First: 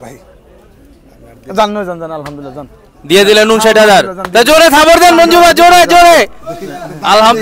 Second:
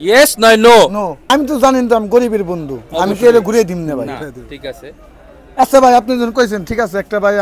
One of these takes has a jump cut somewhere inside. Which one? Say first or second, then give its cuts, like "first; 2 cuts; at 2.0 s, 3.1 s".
second; 1 cut; at 1.2 s